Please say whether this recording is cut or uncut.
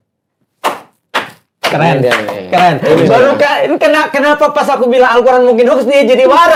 uncut